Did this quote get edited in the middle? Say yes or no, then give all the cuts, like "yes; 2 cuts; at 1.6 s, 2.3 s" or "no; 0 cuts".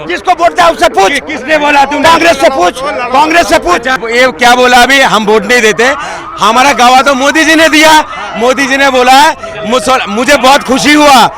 yes; 1 cut; at 4.0 s